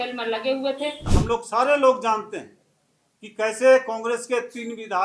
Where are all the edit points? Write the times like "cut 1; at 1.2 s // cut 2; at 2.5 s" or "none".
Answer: cut 1; at 1.1 s